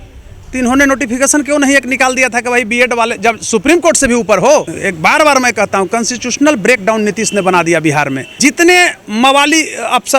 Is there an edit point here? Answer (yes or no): yes